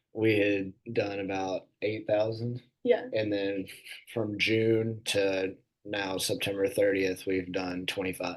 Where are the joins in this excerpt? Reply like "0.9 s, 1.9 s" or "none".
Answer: none